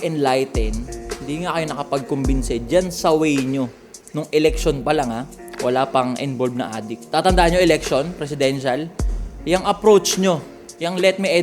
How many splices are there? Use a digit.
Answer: 1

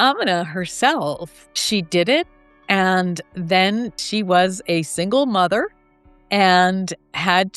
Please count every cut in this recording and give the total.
0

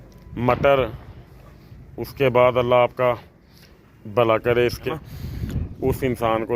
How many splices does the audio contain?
1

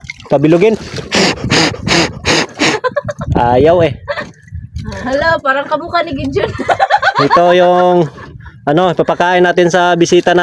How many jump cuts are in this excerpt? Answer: 0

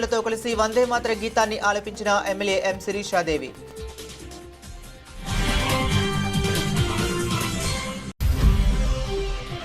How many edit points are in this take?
2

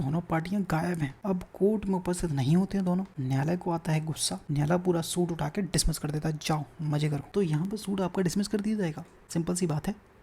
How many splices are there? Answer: 5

